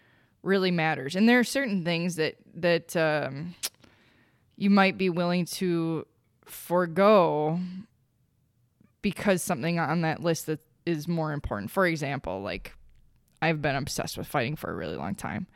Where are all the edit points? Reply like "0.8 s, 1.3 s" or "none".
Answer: none